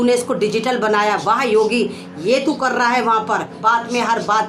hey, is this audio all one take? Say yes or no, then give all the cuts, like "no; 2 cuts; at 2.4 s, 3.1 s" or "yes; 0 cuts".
no; 1 cut; at 3.6 s